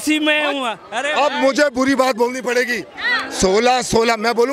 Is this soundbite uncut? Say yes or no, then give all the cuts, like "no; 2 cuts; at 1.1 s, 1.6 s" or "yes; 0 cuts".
yes; 0 cuts